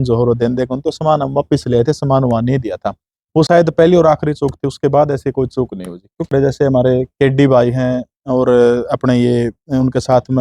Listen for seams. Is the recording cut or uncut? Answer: cut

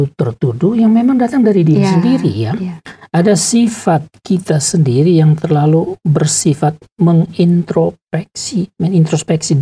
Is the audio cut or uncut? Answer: uncut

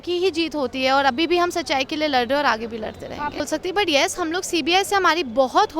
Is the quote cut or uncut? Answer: cut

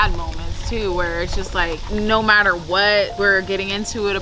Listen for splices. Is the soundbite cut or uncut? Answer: cut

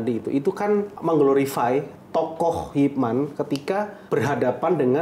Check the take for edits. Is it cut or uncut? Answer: cut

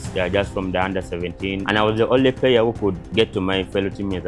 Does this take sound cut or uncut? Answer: cut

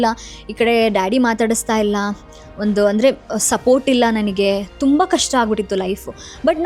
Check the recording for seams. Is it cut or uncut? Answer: uncut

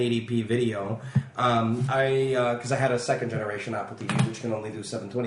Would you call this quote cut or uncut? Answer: cut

